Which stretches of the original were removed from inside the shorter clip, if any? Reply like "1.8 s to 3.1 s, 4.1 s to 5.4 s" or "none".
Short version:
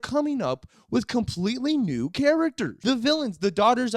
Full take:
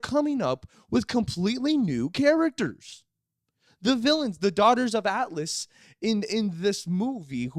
2.7 s to 3.7 s